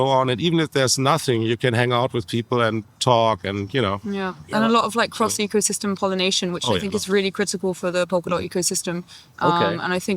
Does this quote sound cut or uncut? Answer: uncut